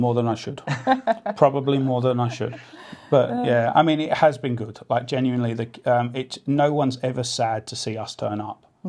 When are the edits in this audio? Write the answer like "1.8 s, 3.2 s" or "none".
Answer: none